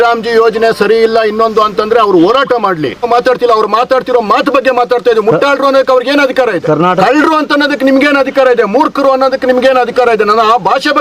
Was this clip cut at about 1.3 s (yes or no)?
no